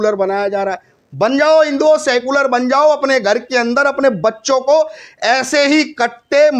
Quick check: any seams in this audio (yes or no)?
no